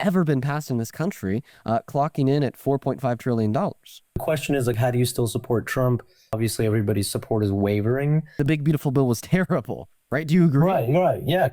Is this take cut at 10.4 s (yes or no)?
no